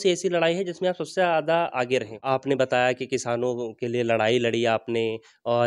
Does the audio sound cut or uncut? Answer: cut